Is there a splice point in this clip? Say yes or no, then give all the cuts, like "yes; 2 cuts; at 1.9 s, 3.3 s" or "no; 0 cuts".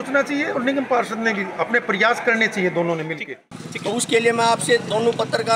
yes; 1 cut; at 3.7 s